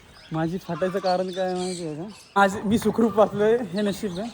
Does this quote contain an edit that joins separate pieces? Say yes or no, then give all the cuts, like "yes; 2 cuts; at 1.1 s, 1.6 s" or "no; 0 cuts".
yes; 1 cut; at 2.4 s